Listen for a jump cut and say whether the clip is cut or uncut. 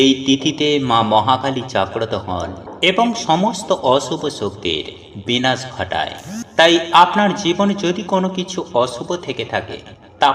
uncut